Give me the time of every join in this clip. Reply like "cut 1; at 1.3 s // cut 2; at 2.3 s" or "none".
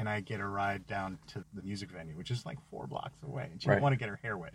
cut 1; at 1.4 s

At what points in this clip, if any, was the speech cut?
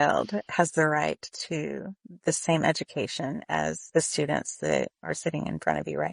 cut 1; at 3.8 s // cut 2; at 5.0 s

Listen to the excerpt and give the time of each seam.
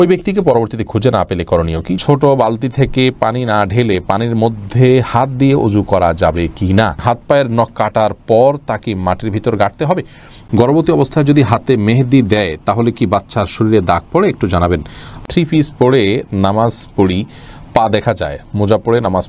cut 1; at 2.0 s // cut 2; at 7.0 s // cut 3; at 10.3 s // cut 4; at 15.2 s

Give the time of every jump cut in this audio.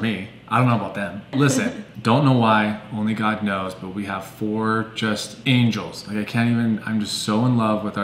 none

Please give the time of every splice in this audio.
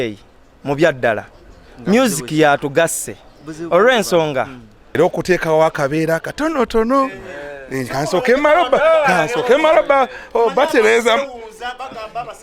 cut 1; at 4.8 s

